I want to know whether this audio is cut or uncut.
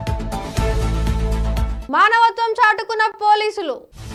uncut